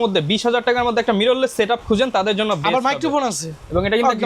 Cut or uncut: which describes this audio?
uncut